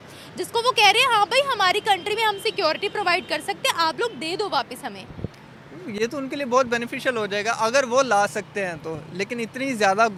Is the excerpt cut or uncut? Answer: uncut